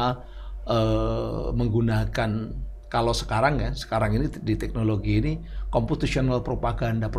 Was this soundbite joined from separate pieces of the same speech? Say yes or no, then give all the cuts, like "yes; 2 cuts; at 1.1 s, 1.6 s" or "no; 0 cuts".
no; 0 cuts